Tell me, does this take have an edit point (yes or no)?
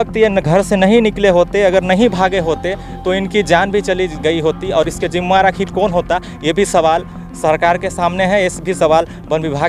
no